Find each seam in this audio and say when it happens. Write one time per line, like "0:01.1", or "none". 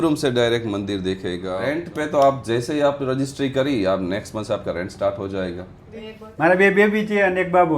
0:01.6
0:06.2